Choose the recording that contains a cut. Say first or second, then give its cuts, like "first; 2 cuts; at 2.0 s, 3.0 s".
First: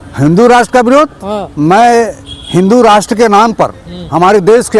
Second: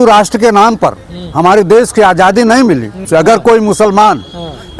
second; 1 cut; at 3.1 s